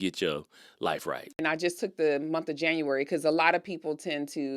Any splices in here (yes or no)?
yes